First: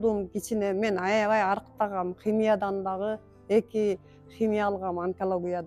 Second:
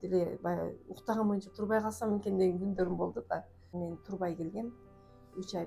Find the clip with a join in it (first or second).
second